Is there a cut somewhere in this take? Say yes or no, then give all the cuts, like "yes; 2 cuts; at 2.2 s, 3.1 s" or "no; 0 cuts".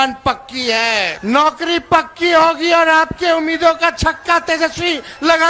yes; 1 cut; at 1.1 s